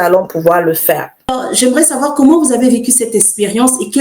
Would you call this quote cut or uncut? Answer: cut